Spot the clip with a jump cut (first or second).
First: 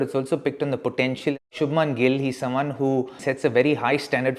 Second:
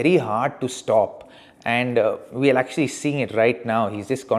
first